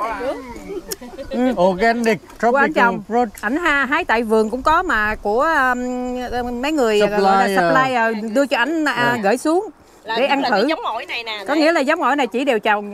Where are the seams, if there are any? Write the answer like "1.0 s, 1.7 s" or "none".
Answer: none